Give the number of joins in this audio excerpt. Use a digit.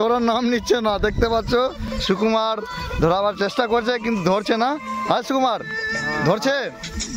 0